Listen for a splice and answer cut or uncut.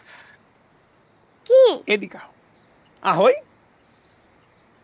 uncut